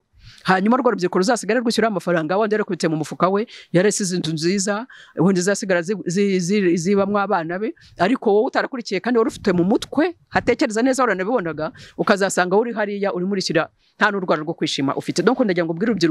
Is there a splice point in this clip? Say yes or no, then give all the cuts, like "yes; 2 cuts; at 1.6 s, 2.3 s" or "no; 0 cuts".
no; 0 cuts